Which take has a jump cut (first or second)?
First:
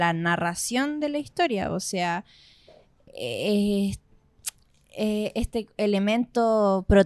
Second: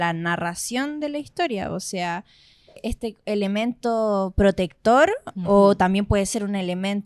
second